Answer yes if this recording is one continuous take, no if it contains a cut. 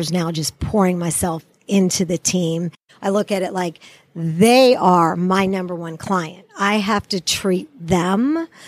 no